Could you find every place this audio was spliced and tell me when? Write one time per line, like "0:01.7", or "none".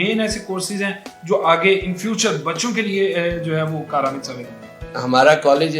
0:04.8